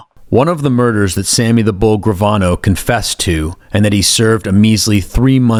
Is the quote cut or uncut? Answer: uncut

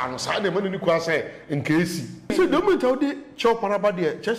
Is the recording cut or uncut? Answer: cut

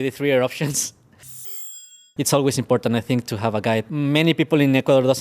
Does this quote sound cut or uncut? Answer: cut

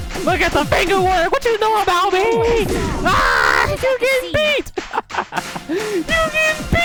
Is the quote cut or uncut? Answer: uncut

